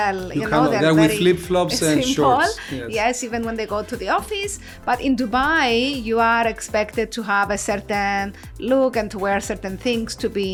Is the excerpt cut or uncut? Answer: uncut